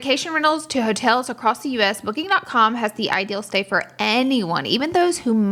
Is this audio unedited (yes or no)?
yes